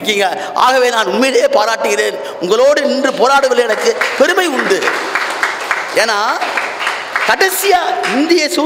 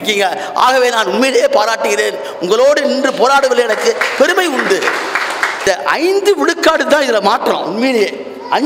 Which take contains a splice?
second; 1 cut; at 5.6 s

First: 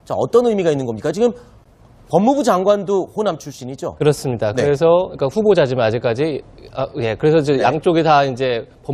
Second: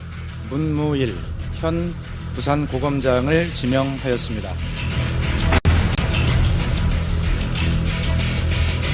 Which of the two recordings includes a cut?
first; 1 cut; at 5.1 s

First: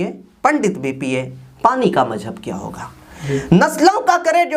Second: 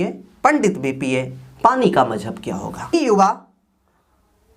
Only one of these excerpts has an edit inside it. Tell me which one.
second; 1 cut; at 2.9 s

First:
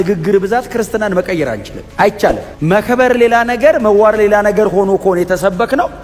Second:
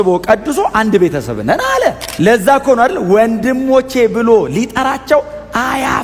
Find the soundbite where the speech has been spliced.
second; 1 cut; at 2.0 s

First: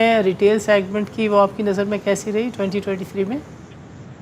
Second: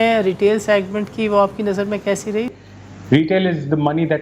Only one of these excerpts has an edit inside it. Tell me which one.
second; 1 cut; at 2.5 s

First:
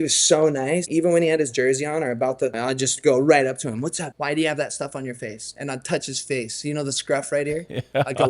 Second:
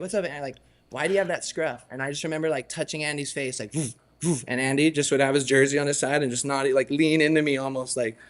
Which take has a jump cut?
first; 3 cuts; at 0.9 s, 2.6 s, 4.1 s

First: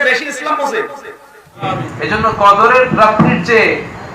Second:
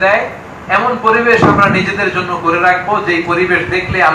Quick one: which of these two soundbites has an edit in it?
first; 1 cut; at 1.6 s

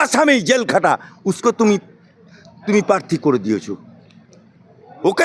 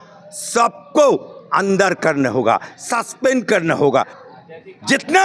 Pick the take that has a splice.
second; 1 cut; at 3.9 s

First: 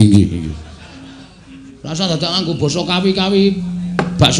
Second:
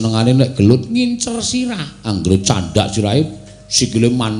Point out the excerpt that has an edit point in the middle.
first; 1 cut; at 1.7 s

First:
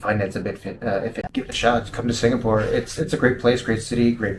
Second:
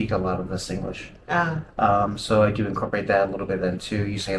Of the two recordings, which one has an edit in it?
first; 1 cut; at 1.3 s

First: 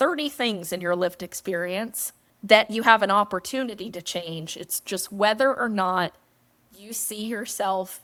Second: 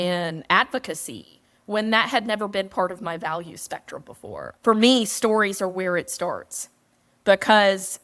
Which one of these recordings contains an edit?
second; 1 cut; at 4.5 s

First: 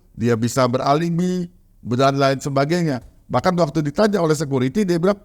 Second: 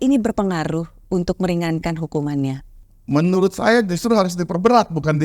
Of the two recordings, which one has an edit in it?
second; 1 cut; at 2.7 s

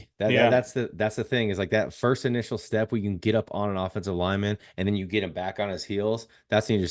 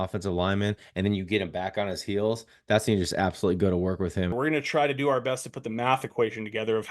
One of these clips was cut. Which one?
second; 1 cut; at 4.3 s

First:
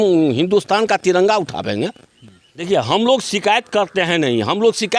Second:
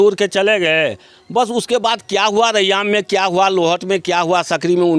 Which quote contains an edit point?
first; 1 cut; at 2.4 s

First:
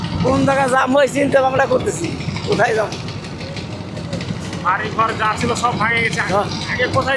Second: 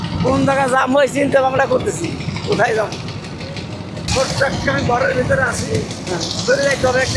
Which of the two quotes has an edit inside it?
second; 1 cut; at 4.1 s

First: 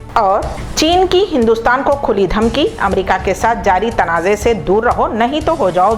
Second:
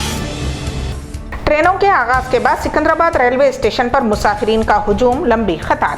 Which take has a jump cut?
second; 1 cut; at 1.1 s

